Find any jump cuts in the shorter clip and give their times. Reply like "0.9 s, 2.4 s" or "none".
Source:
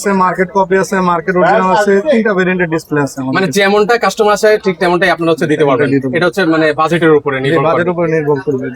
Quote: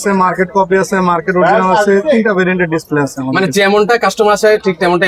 none